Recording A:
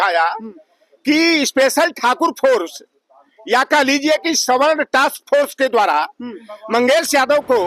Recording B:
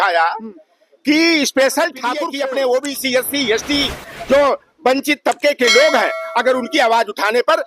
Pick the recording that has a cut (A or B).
B